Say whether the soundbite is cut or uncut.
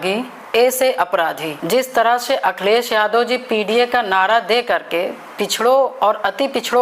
cut